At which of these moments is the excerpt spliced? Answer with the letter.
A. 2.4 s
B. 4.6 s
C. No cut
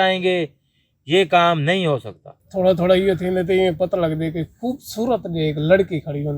A